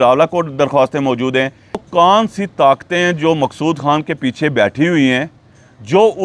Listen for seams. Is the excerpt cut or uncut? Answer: cut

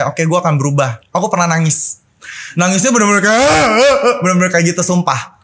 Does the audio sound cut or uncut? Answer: cut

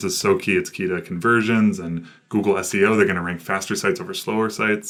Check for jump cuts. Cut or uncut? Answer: uncut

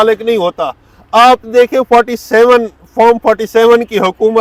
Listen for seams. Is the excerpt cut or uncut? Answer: uncut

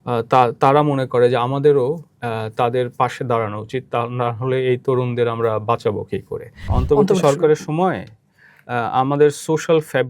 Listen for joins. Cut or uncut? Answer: cut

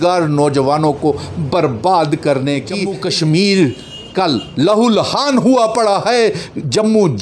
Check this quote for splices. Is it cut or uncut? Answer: cut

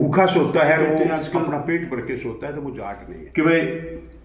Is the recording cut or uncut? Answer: cut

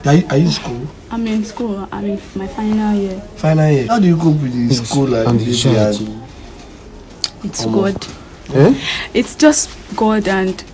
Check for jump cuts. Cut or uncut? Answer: cut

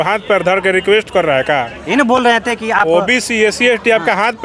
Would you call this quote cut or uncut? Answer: uncut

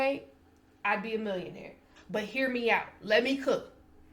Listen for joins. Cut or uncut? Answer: cut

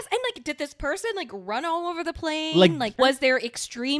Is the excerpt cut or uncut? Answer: cut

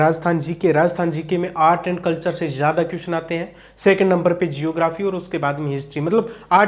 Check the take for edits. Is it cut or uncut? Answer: uncut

